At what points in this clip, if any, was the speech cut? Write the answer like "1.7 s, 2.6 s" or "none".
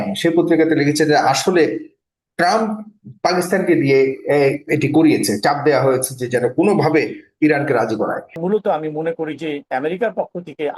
8.4 s